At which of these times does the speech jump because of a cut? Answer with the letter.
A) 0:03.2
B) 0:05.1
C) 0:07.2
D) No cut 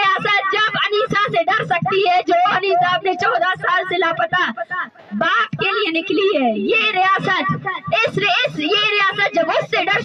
D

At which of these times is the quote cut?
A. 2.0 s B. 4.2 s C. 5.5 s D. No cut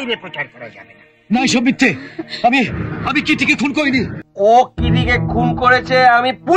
B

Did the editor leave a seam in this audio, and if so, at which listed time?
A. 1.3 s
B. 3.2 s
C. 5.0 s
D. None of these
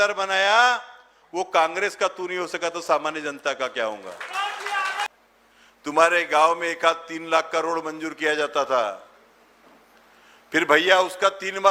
C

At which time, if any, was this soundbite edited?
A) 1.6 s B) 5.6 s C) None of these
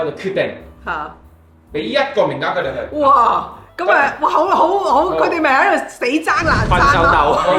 C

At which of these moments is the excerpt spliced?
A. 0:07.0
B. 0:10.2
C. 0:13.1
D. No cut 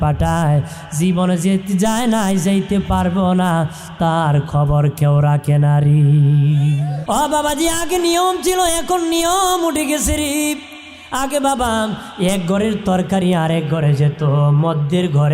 A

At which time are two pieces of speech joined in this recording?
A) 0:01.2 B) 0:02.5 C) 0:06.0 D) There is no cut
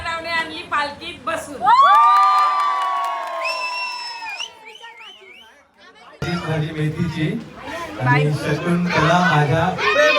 C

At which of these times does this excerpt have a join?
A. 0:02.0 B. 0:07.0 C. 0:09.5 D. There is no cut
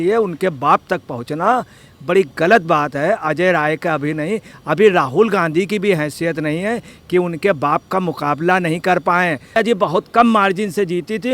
C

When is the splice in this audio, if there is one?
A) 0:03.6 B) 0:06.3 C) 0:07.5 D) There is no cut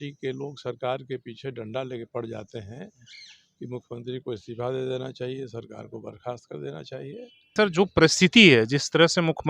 C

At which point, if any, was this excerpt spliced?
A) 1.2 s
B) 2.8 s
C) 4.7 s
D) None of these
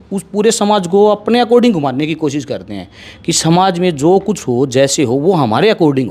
D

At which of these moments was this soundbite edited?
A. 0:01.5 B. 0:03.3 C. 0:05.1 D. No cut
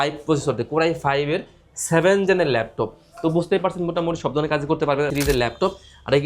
C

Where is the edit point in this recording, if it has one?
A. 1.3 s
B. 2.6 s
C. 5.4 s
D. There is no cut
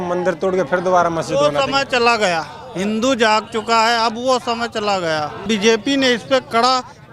C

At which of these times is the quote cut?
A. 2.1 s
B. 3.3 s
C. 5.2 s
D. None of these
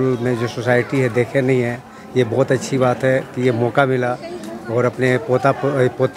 D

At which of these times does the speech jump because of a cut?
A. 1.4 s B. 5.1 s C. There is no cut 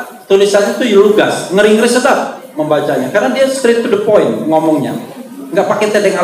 C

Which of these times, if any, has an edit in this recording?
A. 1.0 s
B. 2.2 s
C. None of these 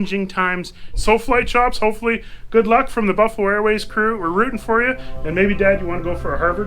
A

